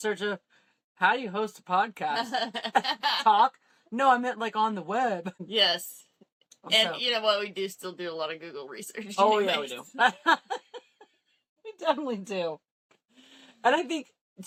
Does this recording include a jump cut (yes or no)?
no